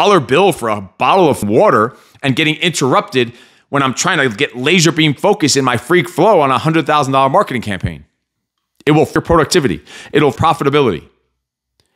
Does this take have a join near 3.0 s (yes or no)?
no